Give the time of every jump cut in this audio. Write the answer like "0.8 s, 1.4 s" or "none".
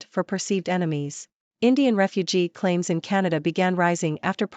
1.4 s